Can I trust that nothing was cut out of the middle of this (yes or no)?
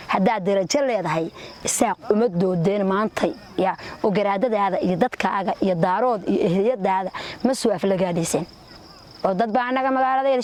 yes